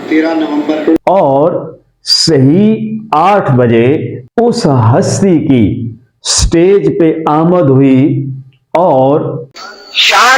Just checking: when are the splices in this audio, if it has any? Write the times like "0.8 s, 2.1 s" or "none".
1.0 s, 9.5 s